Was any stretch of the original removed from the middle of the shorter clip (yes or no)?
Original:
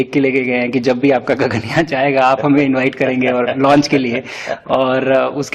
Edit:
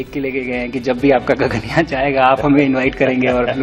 no